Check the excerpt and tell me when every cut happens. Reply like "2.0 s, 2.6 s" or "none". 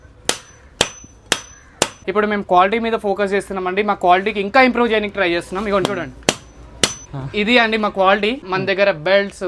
2.0 s, 7.1 s, 8.4 s

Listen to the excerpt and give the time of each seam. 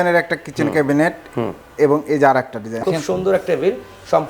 2.8 s

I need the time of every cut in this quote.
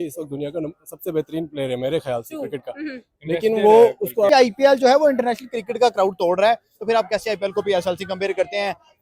4.3 s

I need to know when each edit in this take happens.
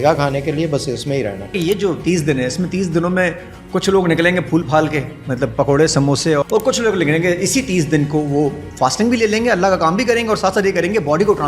1.5 s, 6.4 s

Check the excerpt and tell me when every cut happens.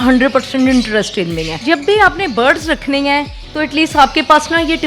1.6 s

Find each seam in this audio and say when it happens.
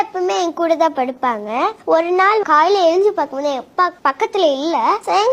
2.4 s, 4.0 s

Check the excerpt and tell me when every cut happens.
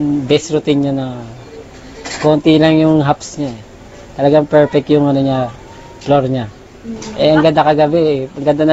none

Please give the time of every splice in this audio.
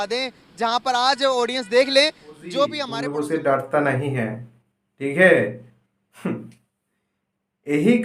2.9 s

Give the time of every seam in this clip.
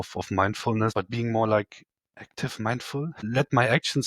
0.9 s, 3.2 s

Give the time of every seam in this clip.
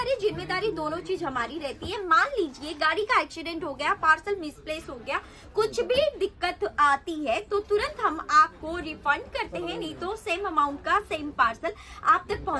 none

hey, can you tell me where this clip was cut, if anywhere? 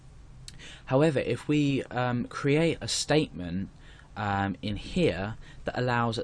4.3 s

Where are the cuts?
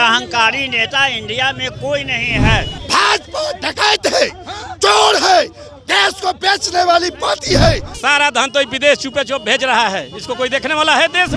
2.8 s, 7.9 s

